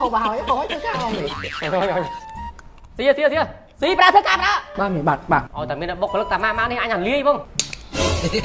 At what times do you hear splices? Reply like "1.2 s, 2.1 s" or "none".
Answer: 1.3 s, 5.5 s, 7.4 s